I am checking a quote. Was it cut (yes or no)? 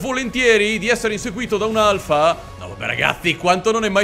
yes